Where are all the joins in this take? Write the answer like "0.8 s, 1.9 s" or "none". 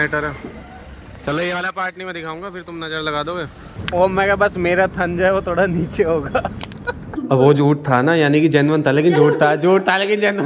3.7 s, 7.2 s